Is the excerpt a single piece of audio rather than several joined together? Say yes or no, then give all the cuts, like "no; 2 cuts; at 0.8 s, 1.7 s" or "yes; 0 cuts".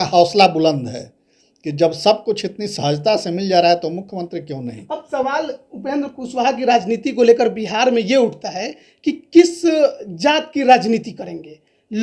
yes; 0 cuts